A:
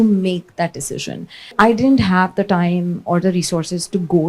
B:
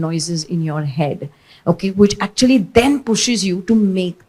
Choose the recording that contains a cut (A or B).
A